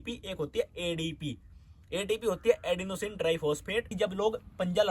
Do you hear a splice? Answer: yes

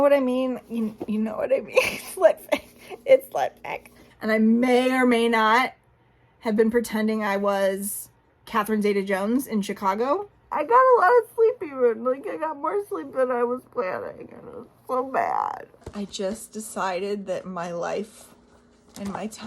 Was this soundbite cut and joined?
yes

